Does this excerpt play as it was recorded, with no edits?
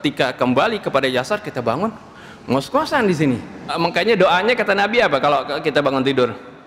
no; 1 cut; at 3.7 s

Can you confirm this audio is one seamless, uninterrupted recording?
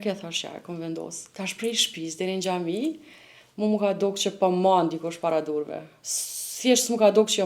no; 1 cut; at 1.2 s

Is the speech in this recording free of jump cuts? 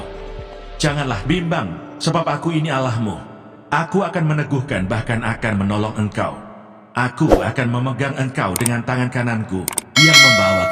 yes; 0 cuts

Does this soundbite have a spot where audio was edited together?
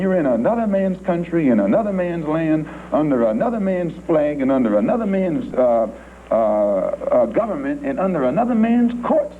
no; 0 cuts

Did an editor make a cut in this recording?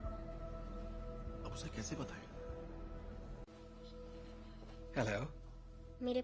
no; 0 cuts

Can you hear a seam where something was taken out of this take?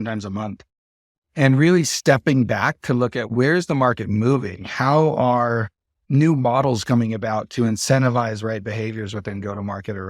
no; 0 cuts

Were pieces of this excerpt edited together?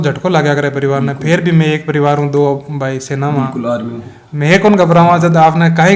no; 0 cuts

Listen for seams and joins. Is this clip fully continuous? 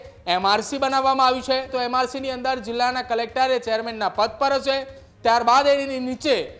no; 1 cut; at 1.7 s

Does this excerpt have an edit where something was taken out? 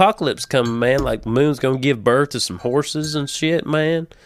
no; 0 cuts

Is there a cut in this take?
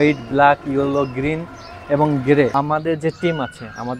yes; 1 cut; at 2.5 s

